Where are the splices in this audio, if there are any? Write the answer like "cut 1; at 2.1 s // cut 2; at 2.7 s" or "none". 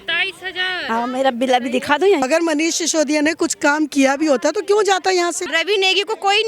cut 1; at 2.2 s // cut 2; at 5.5 s